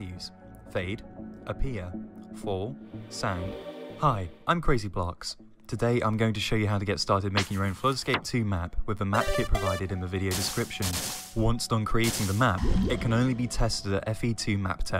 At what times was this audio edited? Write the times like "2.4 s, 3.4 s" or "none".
3.8 s